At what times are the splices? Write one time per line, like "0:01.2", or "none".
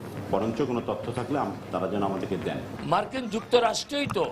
0:02.8

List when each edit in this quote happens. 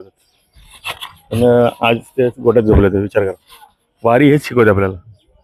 none

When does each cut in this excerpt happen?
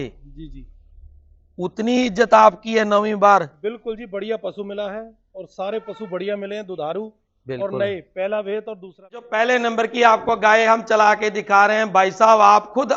0:09.3

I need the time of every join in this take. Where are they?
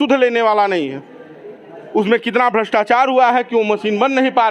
none

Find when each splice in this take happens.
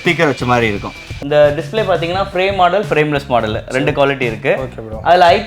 0:01.2

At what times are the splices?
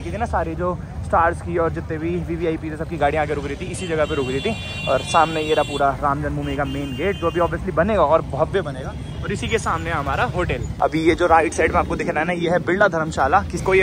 none

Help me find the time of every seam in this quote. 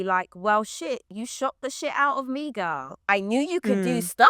0:03.1

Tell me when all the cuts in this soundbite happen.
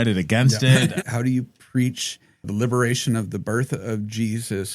0:01.0
0:02.5

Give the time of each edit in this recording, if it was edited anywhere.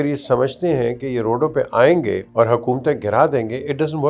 0:02.2

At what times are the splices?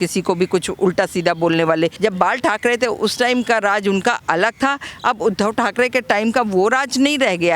0:01.9

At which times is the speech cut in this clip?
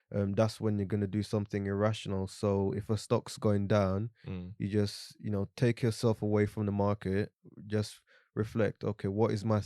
none

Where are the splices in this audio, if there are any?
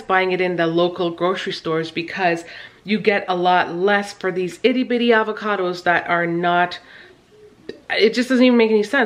none

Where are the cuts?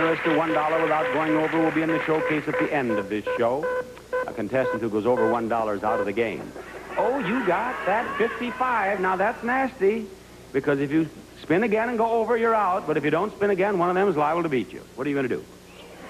0:12.6

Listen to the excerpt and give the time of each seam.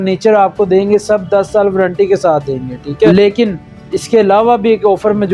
0:03.1

